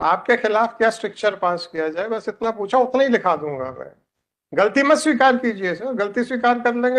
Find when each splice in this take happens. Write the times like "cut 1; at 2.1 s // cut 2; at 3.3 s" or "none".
none